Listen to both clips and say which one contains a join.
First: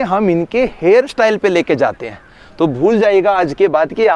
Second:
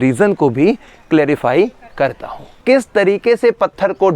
second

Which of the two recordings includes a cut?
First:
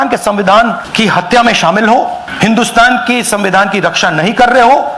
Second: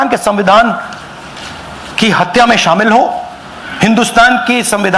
first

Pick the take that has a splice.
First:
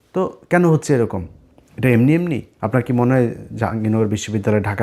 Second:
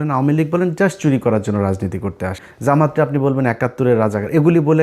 second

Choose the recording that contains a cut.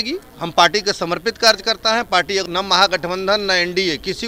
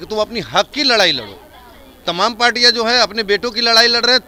first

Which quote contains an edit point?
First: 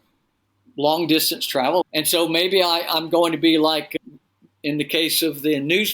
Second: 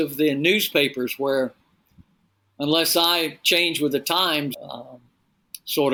first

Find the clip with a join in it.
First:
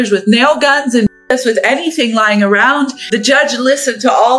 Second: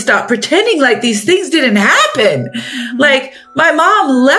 first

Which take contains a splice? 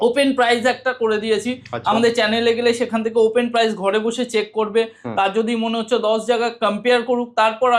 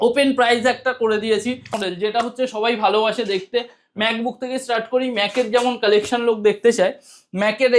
second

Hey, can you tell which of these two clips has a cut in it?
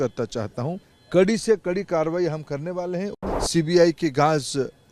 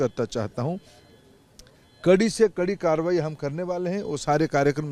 first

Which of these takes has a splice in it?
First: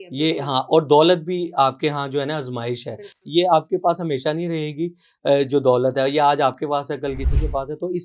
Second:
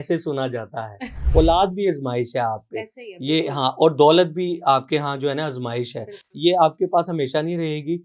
second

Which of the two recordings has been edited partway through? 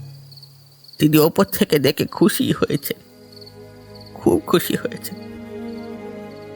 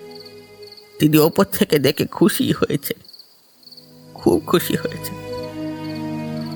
first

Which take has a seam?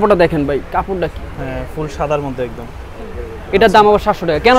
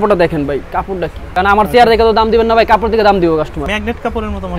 second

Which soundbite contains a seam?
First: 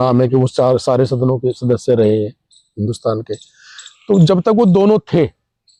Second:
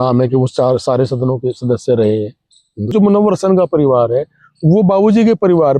second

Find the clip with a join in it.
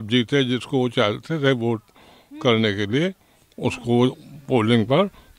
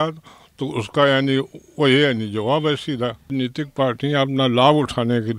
second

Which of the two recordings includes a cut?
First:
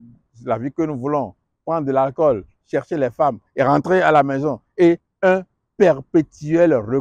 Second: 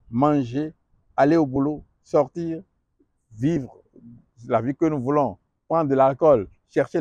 first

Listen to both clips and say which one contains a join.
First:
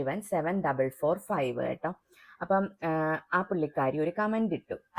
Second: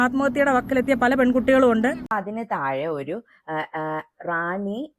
second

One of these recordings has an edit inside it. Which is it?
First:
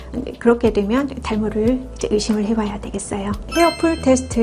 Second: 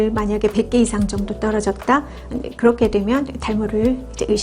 first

